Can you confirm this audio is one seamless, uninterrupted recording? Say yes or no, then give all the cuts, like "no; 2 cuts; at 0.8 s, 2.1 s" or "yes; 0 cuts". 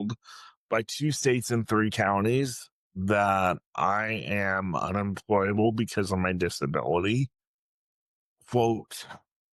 yes; 0 cuts